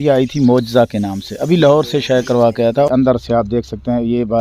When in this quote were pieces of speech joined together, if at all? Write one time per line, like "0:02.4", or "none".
0:02.9